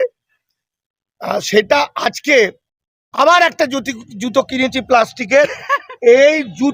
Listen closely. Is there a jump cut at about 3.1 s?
no; 0 cuts

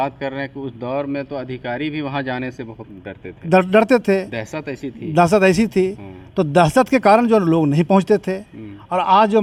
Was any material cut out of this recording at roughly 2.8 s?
no; 0 cuts

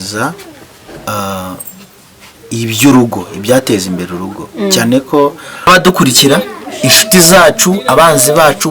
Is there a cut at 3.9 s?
no; 1 cut; at 5.7 s

